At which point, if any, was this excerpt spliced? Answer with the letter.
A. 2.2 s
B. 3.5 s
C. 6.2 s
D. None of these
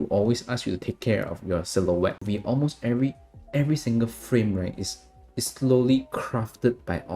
A